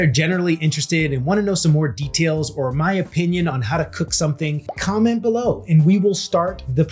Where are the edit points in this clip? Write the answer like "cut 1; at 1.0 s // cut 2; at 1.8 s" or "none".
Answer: none

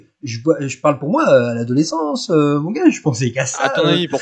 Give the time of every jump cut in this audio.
none

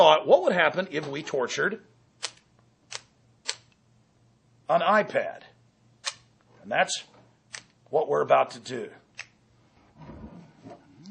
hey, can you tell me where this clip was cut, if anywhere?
none

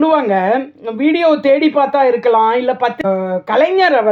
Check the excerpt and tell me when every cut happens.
cut 1; at 3.0 s

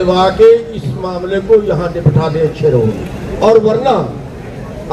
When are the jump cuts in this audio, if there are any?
cut 1; at 3.4 s

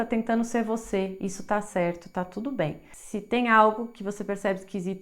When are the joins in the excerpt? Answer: cut 1; at 2.9 s

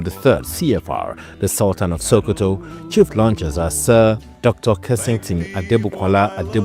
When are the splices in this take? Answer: none

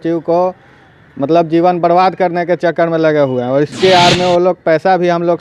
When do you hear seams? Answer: none

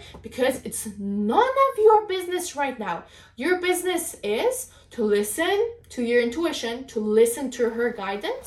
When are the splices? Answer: none

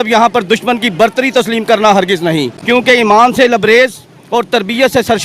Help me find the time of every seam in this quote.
cut 1; at 2.6 s

